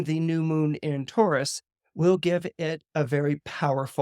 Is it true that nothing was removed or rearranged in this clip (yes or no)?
yes